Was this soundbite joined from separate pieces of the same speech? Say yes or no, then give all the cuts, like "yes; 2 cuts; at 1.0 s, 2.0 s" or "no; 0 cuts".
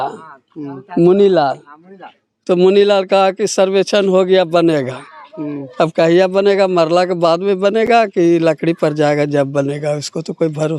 no; 0 cuts